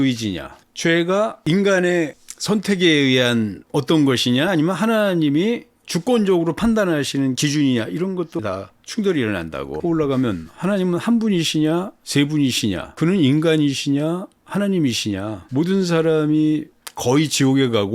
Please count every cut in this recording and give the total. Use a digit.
3